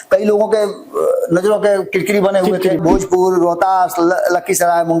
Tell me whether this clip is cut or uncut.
cut